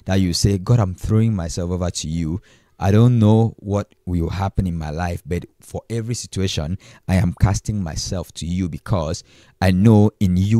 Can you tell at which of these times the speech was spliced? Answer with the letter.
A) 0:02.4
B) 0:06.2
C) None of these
C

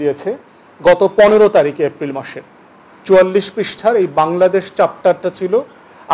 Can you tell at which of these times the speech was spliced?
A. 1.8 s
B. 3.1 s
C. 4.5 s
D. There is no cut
D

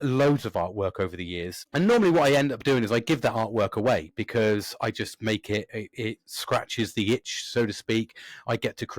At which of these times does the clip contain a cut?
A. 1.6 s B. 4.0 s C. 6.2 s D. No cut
A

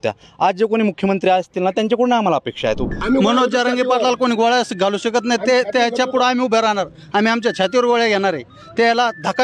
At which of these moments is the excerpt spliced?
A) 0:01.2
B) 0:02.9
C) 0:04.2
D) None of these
B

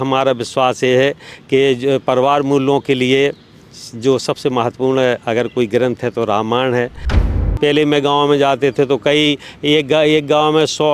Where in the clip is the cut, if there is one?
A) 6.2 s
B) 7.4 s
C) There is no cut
B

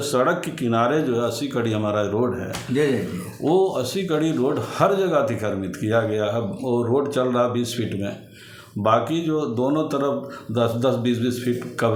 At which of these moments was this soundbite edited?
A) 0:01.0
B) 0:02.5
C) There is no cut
C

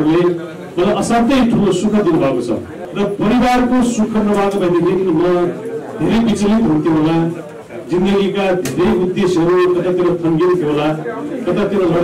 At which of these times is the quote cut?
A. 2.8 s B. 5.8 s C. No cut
A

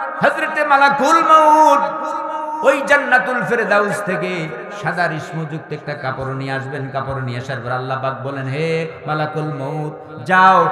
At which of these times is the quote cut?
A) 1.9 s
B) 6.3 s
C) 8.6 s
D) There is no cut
D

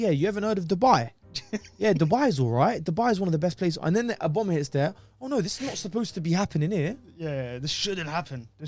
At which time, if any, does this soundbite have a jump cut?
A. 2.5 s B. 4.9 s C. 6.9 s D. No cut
D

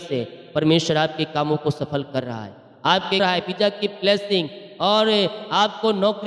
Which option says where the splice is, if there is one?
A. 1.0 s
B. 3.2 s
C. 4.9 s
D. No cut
B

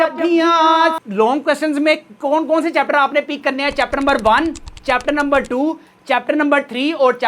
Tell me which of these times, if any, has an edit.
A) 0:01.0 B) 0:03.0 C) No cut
A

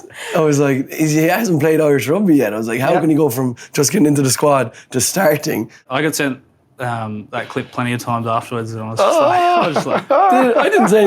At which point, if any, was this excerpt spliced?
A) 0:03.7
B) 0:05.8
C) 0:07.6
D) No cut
B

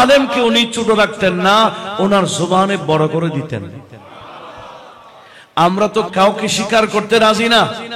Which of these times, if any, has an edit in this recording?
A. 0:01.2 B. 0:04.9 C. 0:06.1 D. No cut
C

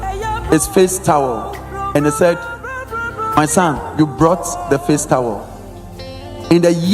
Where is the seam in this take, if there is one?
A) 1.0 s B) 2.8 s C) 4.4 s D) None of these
D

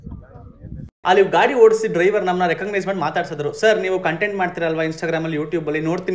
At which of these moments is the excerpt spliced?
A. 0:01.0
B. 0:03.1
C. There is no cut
A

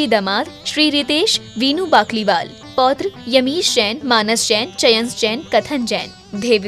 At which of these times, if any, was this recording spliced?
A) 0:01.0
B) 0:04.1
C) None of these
C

